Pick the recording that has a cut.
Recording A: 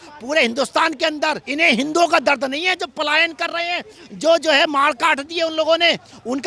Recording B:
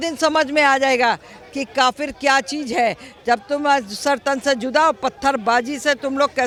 A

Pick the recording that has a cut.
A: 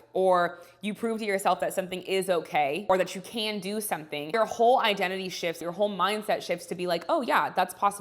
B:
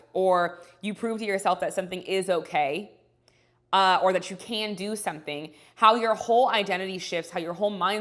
A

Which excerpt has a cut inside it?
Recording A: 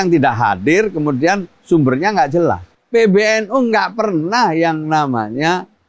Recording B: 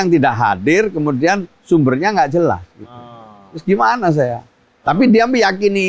A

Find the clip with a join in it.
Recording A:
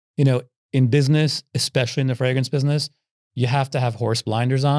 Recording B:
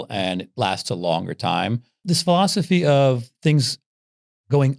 B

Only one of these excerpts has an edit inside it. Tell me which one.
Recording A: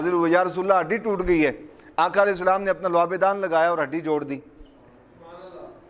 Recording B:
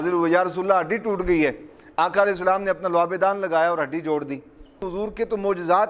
B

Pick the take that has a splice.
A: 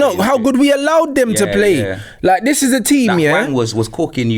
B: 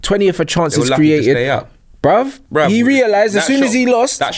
B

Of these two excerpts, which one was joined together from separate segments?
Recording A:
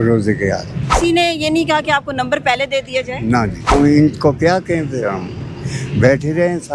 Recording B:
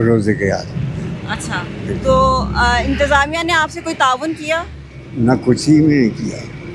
A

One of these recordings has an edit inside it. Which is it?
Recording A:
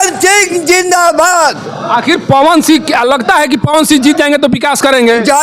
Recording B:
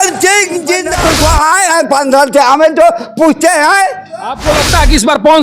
B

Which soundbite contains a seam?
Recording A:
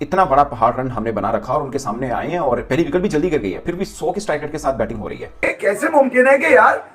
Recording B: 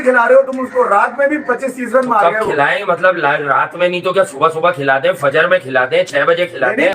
A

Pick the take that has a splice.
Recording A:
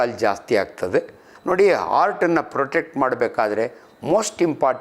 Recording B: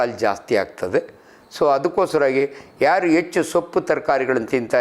A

